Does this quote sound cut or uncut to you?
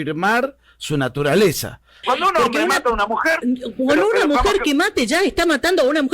cut